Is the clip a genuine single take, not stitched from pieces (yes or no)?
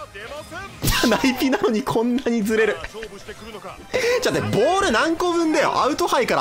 yes